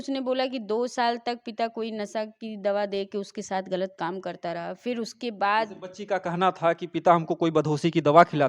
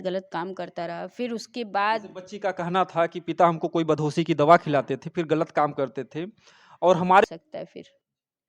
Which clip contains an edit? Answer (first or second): second